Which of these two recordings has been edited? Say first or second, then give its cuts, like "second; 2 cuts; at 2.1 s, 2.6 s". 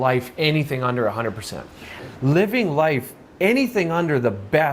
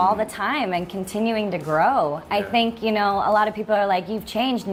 first; 1 cut; at 2.0 s